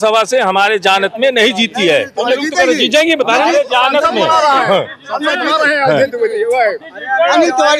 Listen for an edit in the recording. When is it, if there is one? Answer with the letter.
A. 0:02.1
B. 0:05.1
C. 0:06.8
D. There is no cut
D